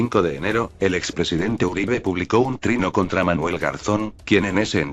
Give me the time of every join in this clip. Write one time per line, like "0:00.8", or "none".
0:03.1